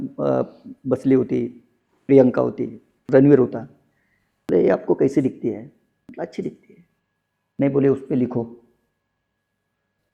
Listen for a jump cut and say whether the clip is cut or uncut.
uncut